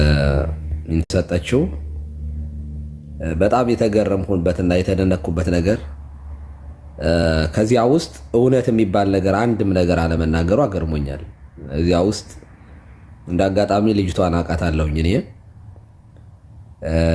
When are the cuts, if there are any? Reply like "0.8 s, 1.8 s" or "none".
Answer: 1.1 s